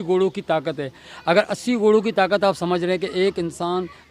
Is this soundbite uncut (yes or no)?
yes